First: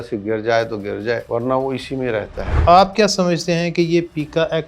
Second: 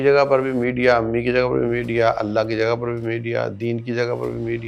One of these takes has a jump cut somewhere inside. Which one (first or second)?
first